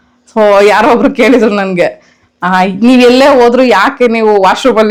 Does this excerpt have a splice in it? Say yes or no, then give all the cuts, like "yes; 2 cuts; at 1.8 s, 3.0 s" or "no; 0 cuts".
no; 0 cuts